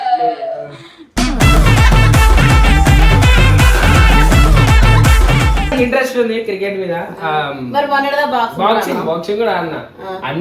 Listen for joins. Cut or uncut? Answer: cut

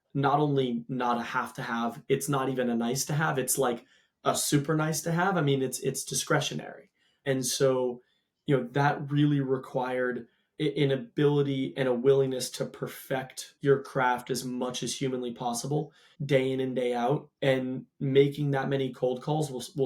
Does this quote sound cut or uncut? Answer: uncut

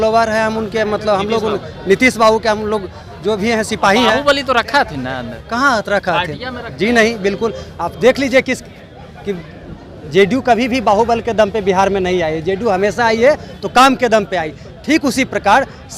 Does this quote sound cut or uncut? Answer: uncut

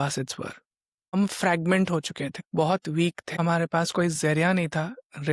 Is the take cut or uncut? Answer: cut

